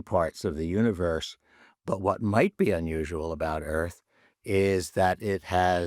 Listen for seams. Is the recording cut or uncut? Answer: uncut